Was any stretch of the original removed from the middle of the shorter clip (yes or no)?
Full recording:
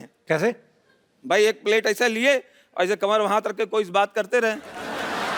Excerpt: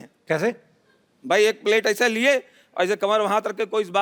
no